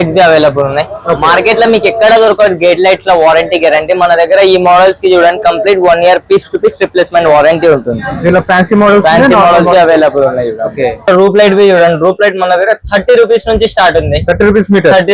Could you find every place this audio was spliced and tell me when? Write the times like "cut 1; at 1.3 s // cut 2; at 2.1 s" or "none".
cut 1; at 11.1 s